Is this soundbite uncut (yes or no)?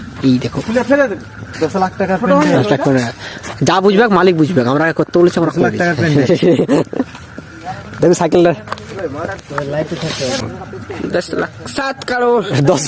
yes